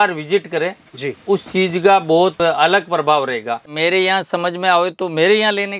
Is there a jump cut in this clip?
yes; 2 cuts; at 2.4 s, 3.7 s

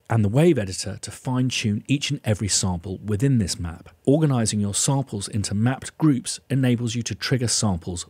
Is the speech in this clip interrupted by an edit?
no; 0 cuts

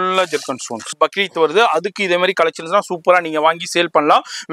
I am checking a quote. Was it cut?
yes; 1 cut; at 1.0 s

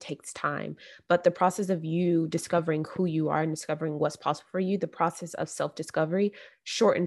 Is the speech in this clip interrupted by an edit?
no; 0 cuts

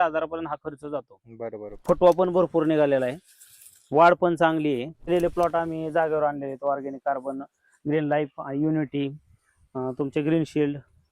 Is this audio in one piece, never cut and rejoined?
no; 2 cuts; at 1.8 s, 5.1 s

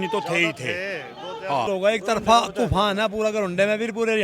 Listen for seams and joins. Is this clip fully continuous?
no; 1 cut; at 1.7 s

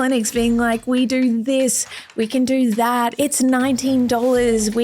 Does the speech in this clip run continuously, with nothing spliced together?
no; 1 cut; at 3.1 s

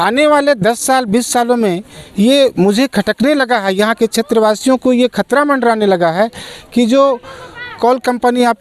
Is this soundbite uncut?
yes; 0 cuts

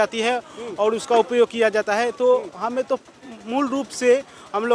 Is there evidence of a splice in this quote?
no; 0 cuts

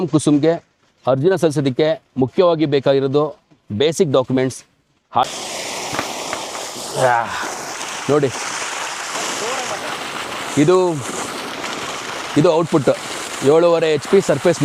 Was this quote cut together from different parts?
yes; 1 cut; at 5.3 s

